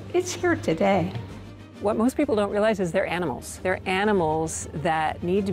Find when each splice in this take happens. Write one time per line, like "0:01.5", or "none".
0:01.2
0:03.5